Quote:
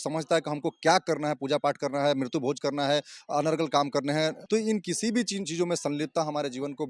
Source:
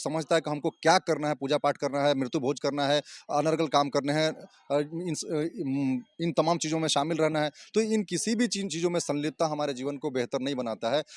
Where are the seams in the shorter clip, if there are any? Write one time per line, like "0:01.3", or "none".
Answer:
0:04.4